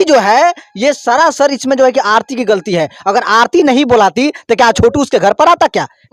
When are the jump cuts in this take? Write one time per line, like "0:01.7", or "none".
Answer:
none